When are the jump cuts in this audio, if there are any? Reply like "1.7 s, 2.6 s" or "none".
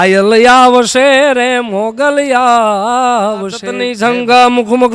4.1 s